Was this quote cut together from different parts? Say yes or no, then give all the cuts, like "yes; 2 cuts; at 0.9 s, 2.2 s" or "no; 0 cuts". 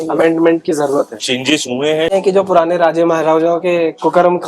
yes; 1 cut; at 2.1 s